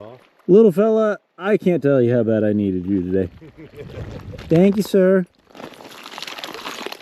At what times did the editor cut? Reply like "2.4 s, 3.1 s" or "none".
none